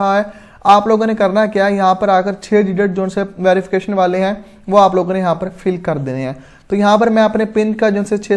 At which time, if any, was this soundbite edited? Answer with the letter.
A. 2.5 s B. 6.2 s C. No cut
C